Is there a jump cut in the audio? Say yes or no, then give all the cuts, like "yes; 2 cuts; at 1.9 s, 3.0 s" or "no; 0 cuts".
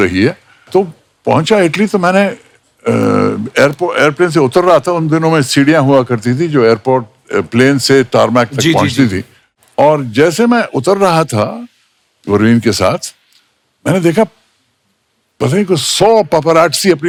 no; 0 cuts